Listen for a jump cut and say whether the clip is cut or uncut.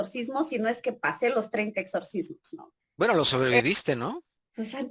uncut